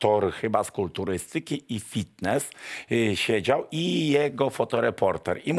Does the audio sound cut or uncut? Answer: uncut